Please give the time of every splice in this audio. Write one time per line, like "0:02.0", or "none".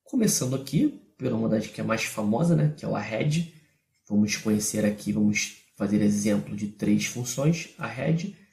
0:01.3